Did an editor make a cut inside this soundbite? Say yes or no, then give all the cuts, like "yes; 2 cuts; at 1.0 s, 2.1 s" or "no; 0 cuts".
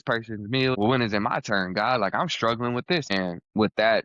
yes; 2 cuts; at 0.8 s, 3.0 s